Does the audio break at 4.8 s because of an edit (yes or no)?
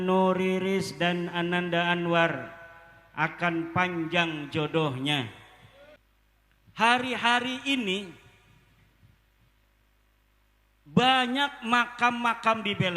no